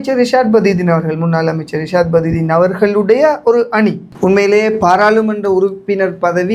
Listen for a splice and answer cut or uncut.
cut